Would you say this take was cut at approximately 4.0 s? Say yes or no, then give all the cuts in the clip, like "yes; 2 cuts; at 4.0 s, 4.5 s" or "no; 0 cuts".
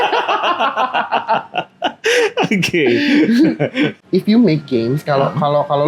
yes; 1 cut; at 4.0 s